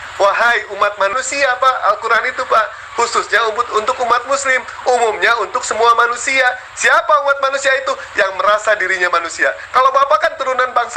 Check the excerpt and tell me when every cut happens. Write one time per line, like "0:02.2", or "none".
0:01.2